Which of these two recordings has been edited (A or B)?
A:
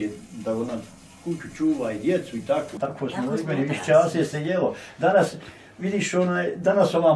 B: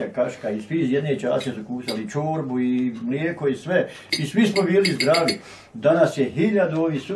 A